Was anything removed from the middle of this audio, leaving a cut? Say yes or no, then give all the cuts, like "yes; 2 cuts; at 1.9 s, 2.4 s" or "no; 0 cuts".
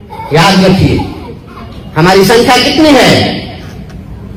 no; 0 cuts